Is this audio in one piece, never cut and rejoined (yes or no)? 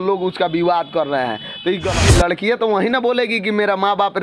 no